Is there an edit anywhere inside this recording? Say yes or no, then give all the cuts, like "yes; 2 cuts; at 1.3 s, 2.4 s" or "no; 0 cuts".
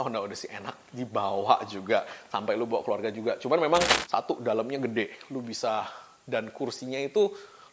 yes; 1 cut; at 3.9 s